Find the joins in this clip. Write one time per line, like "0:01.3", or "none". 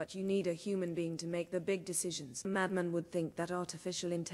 0:02.5